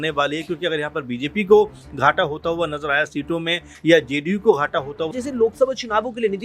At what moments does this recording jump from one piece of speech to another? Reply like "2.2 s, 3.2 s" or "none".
5.2 s